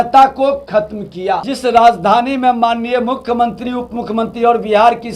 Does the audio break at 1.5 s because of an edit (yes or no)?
yes